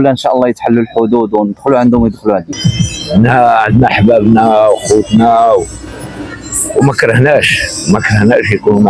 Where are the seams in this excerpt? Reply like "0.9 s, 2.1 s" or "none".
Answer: 2.5 s